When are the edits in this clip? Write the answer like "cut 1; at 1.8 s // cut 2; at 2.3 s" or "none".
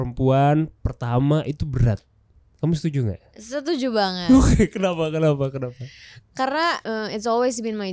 cut 1; at 6.8 s